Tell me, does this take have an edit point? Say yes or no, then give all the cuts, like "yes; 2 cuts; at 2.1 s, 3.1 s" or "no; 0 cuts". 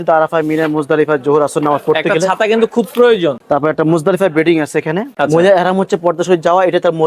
yes; 2 cuts; at 3.4 s, 5.1 s